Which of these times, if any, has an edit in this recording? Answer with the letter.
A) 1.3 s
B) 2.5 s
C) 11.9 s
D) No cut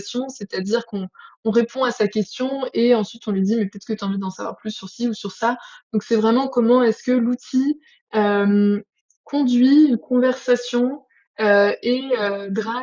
D